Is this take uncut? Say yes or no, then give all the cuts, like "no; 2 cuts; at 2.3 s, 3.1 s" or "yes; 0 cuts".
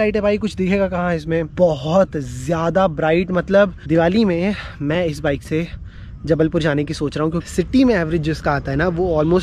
no; 3 cuts; at 1.5 s, 3.8 s, 7.4 s